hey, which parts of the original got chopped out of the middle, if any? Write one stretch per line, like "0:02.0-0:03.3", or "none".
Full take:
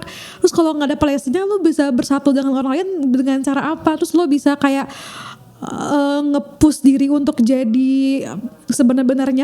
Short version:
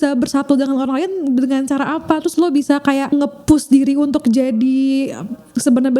0:04.9-0:06.2

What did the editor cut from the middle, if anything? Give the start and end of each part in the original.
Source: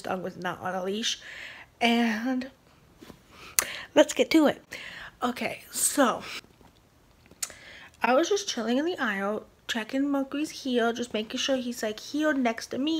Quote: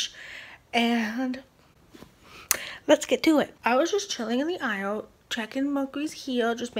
0:04.6-0:07.9

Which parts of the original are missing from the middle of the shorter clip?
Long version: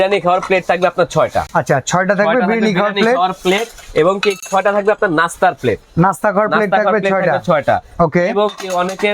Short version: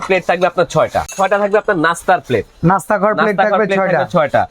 0:01.5-0:04.4

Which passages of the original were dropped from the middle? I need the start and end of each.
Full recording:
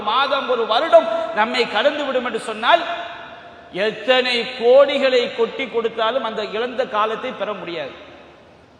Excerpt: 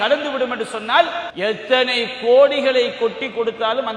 0:03.0-0:03.6

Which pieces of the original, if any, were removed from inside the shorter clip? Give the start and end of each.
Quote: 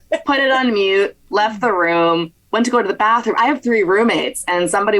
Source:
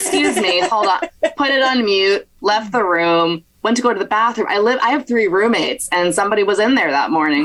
0:04.5-0:04.8

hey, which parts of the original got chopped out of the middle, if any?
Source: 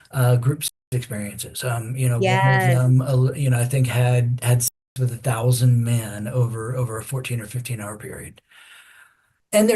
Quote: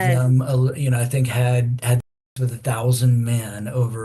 none

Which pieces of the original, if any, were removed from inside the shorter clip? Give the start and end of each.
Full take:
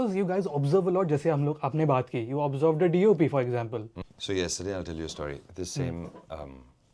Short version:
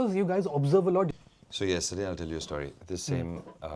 0:01.1-0:03.8

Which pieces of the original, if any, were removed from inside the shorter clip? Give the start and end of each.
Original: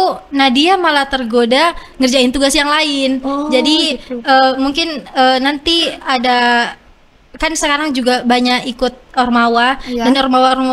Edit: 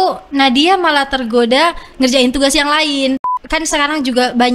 0:03.2-0:07.1

